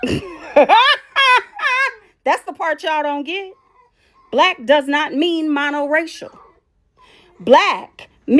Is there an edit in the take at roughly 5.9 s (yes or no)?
no